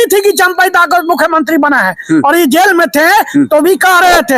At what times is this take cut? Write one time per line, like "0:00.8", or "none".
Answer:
none